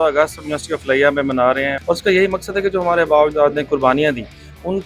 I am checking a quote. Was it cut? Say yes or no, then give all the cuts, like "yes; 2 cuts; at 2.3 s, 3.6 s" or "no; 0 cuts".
yes; 1 cut; at 1.8 s